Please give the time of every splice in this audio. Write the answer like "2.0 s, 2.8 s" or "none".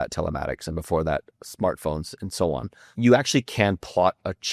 2.8 s